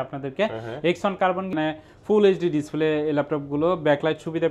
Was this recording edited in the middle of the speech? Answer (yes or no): yes